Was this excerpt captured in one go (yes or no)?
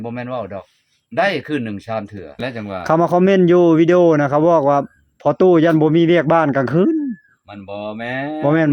no